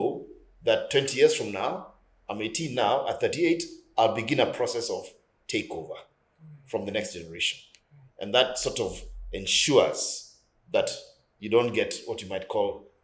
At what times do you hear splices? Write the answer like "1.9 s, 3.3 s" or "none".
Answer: none